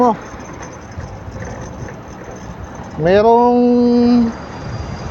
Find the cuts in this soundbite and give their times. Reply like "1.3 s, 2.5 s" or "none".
none